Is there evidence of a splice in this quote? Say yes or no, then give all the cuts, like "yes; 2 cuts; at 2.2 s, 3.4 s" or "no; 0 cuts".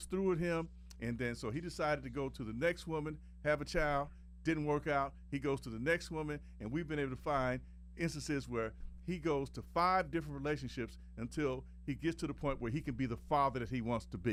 no; 0 cuts